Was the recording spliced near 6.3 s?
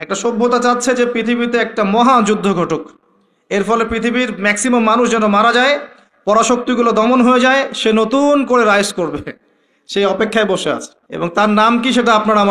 no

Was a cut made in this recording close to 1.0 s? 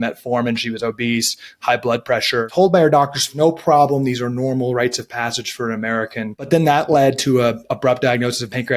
no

